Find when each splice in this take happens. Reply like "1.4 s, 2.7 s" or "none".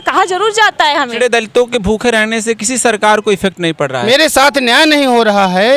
1.1 s, 4.0 s